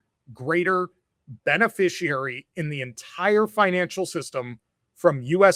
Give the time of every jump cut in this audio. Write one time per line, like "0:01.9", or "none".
none

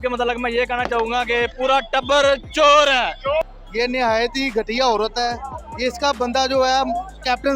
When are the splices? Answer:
0:03.4

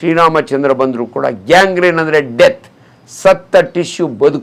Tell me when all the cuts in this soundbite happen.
none

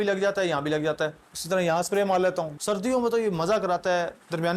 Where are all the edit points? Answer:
0:02.5

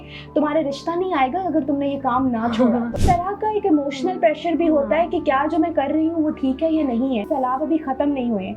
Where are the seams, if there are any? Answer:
0:03.0
0:07.2

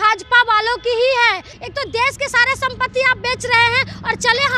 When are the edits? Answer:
0:01.5

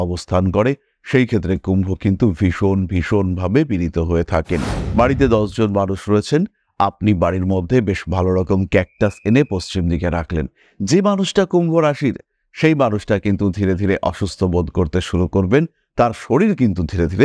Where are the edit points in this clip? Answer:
0:04.8

